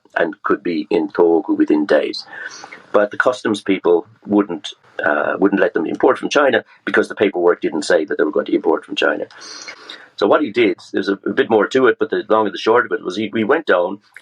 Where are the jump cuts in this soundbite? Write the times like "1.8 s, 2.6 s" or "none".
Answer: 4.7 s, 9.8 s